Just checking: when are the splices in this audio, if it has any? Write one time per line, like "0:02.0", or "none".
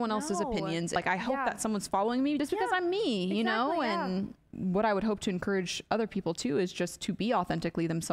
0:01.0
0:02.4
0:04.5